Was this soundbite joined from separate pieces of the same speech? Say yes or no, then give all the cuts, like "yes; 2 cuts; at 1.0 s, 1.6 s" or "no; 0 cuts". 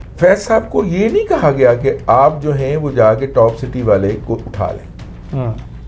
no; 0 cuts